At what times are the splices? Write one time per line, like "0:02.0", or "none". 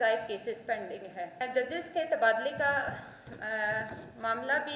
0:01.4